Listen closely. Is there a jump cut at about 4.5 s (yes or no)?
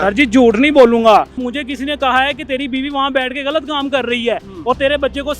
no